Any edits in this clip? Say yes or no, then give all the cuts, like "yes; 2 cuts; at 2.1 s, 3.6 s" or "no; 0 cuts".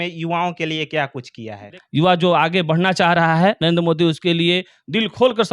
yes; 1 cut; at 1.8 s